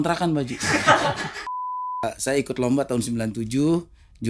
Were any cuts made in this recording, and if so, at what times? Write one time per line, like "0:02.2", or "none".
0:01.7